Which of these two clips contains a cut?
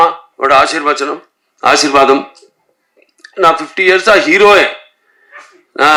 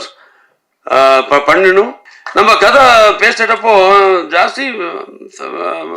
second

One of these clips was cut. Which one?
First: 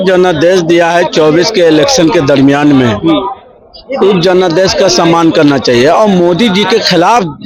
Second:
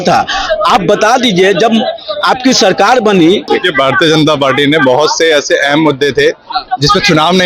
second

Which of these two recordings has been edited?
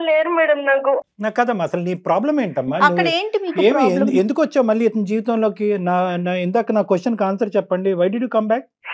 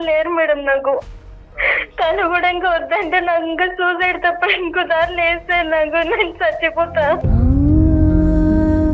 second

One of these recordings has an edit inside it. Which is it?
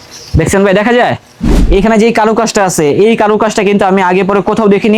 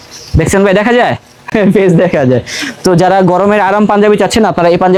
first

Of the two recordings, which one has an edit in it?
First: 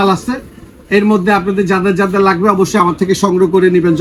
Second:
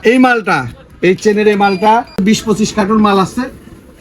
second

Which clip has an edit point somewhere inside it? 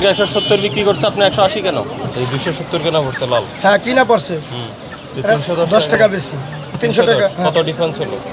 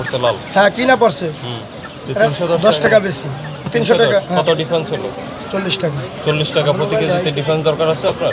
first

